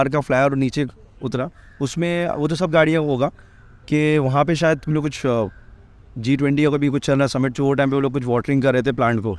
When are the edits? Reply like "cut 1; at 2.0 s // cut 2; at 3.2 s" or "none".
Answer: none

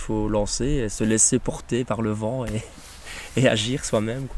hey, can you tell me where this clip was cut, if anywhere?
none

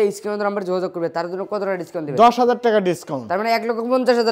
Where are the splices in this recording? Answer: none

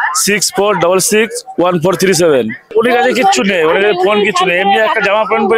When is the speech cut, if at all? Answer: cut 1; at 2.7 s

